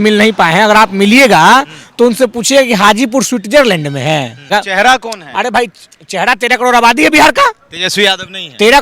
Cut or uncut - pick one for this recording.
cut